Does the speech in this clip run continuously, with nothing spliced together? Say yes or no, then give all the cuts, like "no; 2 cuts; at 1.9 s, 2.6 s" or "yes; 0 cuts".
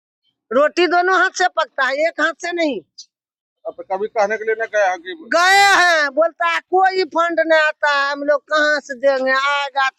yes; 0 cuts